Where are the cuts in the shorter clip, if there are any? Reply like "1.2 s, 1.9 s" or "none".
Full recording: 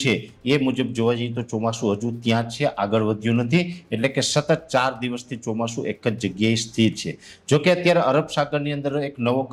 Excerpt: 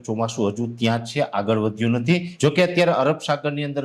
2.3 s